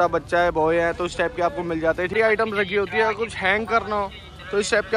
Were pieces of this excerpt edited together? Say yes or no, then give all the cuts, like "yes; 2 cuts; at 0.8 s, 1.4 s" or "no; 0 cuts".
yes; 1 cut; at 2.1 s